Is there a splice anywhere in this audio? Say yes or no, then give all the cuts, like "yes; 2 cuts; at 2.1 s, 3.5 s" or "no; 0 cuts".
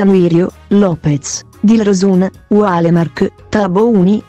yes; 1 cut; at 1.8 s